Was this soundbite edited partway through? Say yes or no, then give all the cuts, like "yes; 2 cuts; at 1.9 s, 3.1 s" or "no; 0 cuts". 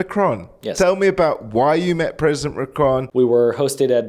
yes; 1 cut; at 3.1 s